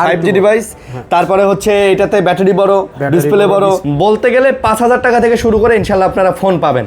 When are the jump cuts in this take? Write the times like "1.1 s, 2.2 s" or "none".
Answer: 3.8 s